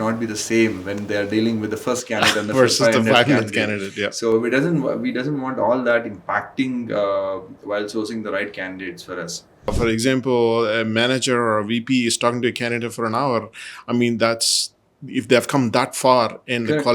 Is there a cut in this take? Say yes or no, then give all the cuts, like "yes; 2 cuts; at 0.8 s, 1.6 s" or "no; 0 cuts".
yes; 1 cut; at 9.7 s